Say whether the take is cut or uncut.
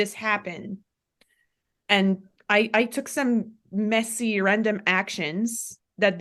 uncut